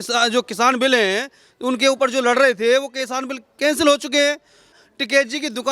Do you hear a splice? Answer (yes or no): yes